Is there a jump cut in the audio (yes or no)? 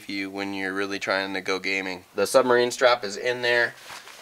yes